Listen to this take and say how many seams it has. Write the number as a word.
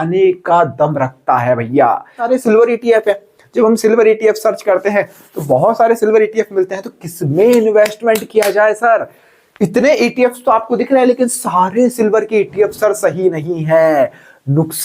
one